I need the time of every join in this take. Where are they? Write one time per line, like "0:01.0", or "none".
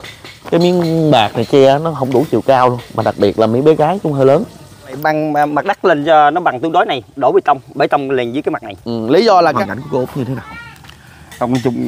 0:05.0
0:09.6

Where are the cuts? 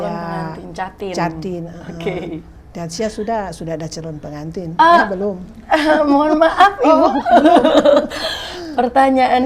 none

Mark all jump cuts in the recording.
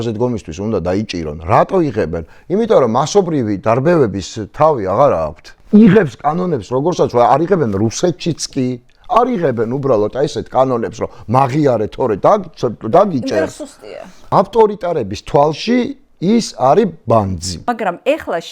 0:05.5
0:14.3
0:17.5

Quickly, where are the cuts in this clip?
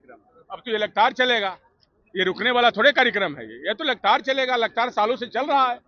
none

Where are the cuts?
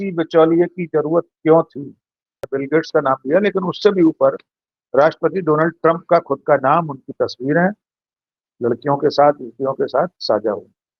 0:02.4

